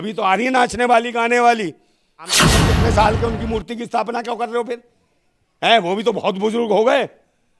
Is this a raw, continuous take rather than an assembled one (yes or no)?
no